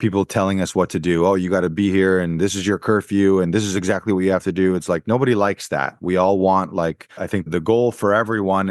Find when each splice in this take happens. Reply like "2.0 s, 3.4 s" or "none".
7.5 s

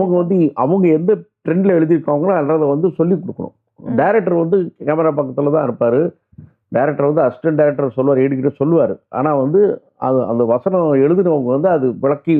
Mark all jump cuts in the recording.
none

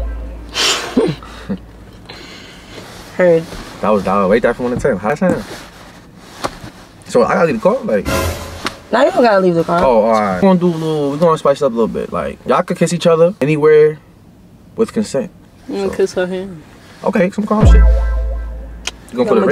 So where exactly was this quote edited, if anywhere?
none

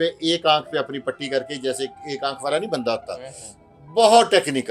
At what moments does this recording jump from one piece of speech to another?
none

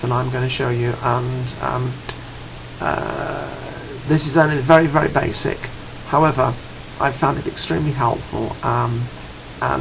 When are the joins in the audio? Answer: none

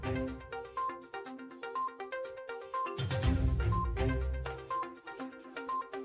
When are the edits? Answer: 0.9 s

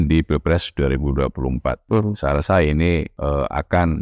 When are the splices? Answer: 1.8 s, 3.1 s

